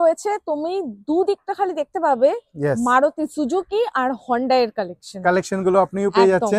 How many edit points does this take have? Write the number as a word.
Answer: zero